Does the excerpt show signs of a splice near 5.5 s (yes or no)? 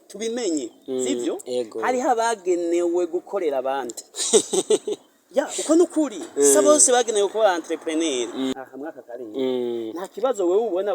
no